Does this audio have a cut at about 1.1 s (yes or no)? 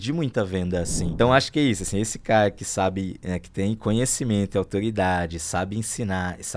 yes